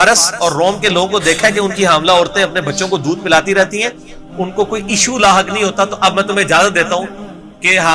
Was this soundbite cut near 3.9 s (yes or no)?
no